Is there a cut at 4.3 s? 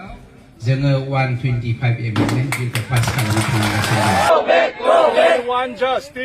yes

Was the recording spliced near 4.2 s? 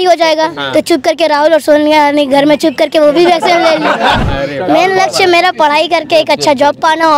yes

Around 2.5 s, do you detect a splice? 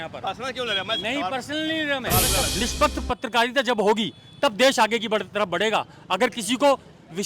yes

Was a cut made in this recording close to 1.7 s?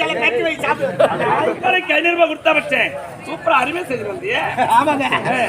yes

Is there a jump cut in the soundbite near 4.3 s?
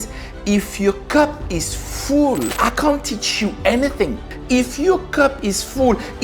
yes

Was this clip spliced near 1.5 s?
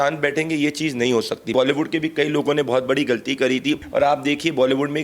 yes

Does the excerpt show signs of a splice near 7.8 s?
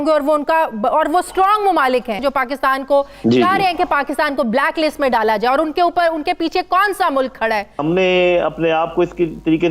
yes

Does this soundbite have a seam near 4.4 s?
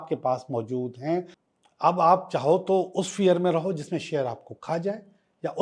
no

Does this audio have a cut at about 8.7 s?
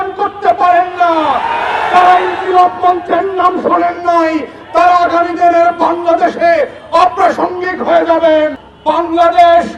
yes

